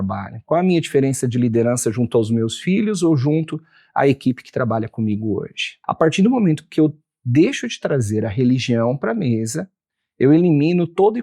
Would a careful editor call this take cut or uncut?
cut